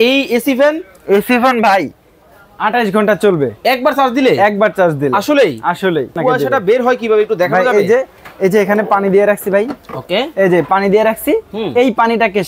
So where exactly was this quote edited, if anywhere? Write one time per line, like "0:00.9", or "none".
0:06.1